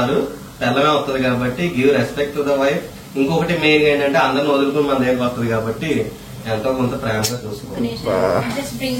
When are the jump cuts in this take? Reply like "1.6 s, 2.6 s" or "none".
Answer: none